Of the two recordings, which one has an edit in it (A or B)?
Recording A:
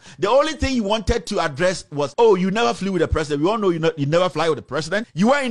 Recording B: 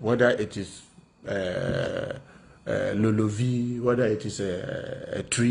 A